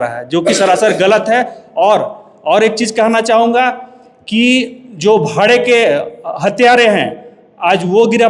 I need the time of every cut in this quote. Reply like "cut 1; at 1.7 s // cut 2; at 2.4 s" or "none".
none